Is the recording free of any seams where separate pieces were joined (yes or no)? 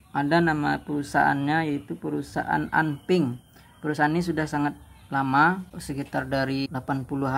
no